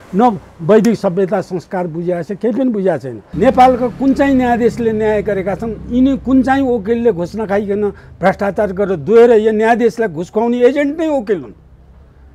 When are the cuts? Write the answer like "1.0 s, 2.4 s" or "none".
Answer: 3.2 s